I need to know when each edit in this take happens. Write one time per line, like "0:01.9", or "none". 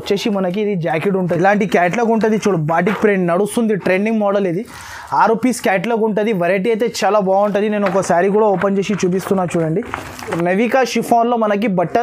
0:01.2
0:10.4